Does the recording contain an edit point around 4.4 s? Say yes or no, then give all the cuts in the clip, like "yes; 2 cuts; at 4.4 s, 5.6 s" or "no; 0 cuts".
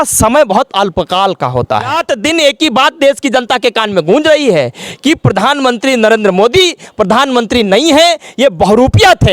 no; 1 cut; at 2.0 s